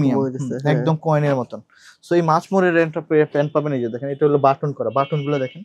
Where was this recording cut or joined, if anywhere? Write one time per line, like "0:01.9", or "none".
none